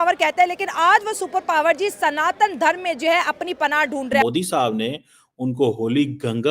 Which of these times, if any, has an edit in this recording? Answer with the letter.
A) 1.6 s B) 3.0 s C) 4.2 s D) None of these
C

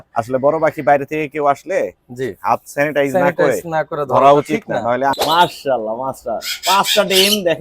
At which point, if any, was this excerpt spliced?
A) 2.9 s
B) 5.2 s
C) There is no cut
B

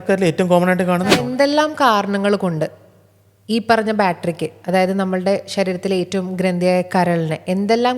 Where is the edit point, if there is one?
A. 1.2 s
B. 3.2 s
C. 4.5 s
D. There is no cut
A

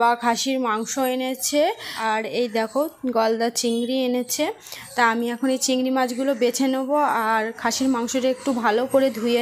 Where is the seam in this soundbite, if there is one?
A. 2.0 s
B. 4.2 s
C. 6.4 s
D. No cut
A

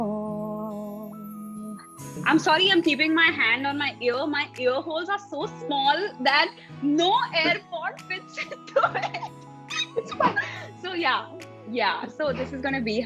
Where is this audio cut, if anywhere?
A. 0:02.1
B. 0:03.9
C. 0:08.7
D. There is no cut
A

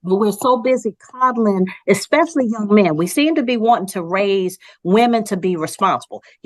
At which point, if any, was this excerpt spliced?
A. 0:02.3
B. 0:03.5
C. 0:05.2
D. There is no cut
D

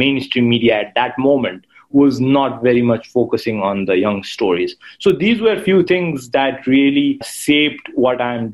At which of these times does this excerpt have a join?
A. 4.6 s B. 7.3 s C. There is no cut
B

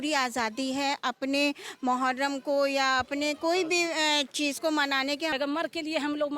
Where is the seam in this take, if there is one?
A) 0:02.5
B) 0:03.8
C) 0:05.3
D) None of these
C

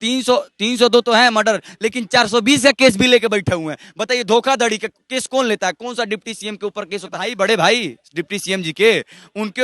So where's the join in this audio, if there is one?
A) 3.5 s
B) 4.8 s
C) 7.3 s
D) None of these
C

